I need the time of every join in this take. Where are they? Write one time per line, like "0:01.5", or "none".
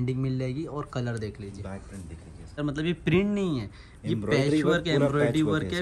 0:02.6